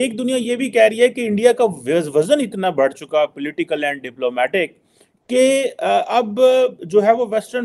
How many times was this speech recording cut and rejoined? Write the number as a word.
zero